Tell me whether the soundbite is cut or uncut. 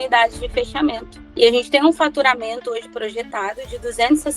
cut